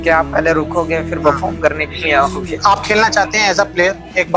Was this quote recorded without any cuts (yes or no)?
no